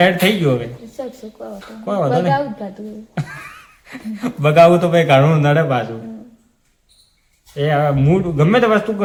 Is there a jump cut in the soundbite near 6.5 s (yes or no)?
no